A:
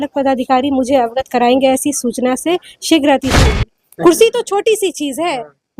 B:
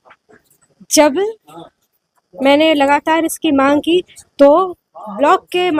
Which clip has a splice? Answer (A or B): A